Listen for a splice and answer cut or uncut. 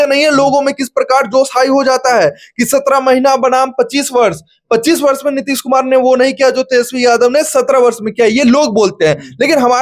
uncut